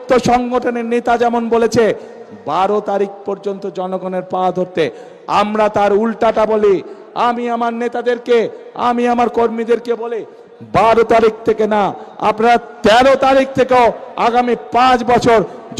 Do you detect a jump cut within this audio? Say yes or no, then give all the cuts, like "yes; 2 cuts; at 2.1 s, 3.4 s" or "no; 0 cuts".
no; 0 cuts